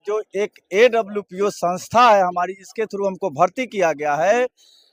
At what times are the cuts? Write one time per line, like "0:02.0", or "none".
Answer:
none